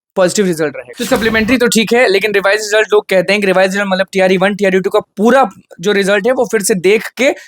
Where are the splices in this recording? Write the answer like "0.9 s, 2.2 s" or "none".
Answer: 1.0 s